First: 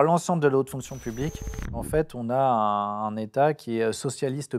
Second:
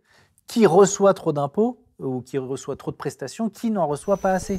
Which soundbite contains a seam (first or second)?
first